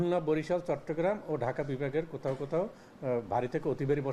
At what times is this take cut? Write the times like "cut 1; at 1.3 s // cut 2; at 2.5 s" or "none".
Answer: none